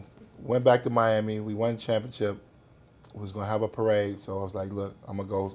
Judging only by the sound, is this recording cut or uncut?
uncut